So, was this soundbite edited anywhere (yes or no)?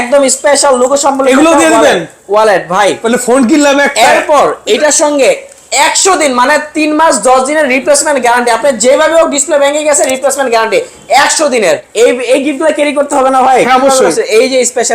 yes